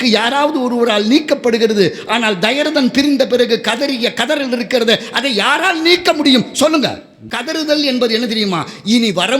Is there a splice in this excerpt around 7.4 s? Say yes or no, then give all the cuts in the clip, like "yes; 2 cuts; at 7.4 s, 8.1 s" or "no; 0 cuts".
yes; 1 cut; at 7.4 s